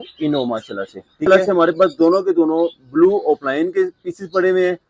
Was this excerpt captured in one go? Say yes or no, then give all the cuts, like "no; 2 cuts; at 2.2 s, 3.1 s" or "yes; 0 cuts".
no; 1 cut; at 1.3 s